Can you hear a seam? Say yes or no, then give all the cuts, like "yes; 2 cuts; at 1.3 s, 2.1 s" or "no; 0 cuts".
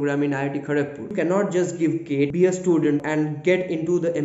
yes; 3 cuts; at 1.1 s, 2.3 s, 3.0 s